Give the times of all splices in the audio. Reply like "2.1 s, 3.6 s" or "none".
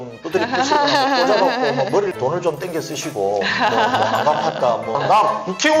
2.2 s, 5.0 s